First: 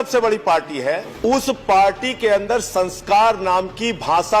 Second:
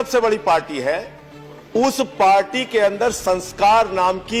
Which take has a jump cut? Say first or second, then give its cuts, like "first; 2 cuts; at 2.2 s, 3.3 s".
first; 1 cut; at 1.1 s